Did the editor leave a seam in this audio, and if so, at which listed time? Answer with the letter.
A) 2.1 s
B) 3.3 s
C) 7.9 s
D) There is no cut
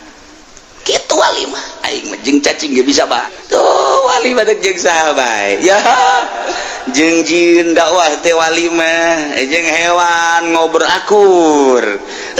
B